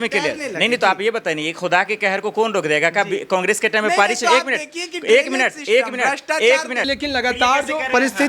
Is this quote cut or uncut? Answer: cut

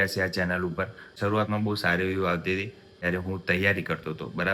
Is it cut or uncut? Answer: cut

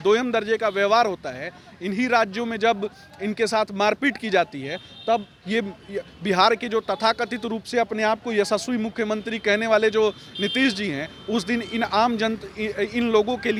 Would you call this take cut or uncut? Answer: uncut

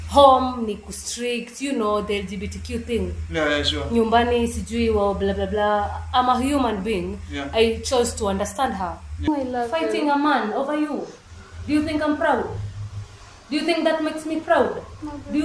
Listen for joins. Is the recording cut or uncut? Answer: cut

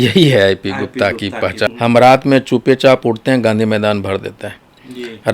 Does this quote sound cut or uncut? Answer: cut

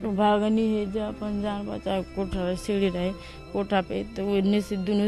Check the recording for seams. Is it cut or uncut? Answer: cut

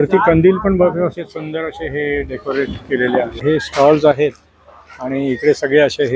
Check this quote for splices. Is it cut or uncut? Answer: cut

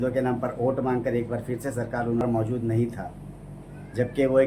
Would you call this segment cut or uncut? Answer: cut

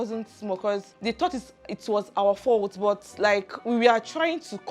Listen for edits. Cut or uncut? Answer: cut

